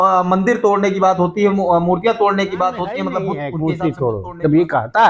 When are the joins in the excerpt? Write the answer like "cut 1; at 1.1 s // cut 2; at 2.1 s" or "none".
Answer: cut 1; at 3.4 s